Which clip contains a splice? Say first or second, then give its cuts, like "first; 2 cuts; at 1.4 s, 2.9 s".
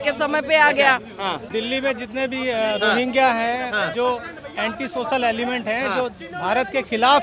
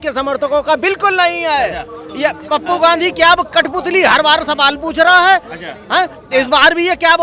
first; 1 cut; at 1.4 s